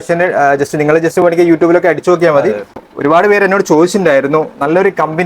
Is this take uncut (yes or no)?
no